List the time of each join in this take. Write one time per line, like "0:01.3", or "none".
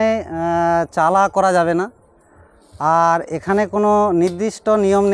none